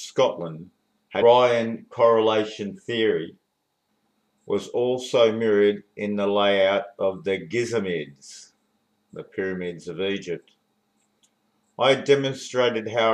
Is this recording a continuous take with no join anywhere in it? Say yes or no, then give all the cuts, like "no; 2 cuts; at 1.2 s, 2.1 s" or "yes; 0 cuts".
yes; 0 cuts